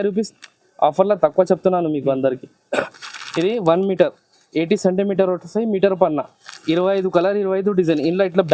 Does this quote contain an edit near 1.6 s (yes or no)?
no